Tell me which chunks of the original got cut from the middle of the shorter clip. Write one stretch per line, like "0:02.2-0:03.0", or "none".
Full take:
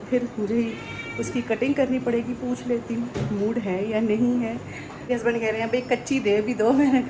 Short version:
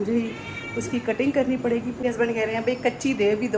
0:02.4-0:05.0